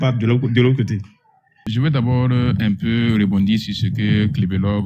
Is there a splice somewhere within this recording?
yes; 1 cut; at 1.7 s

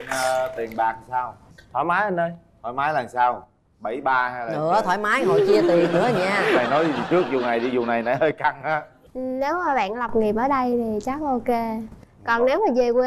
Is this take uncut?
no; 1 cut; at 9.1 s

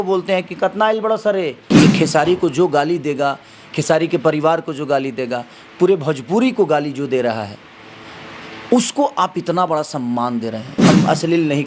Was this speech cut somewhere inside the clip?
yes; 2 cuts; at 1.6 s, 10.7 s

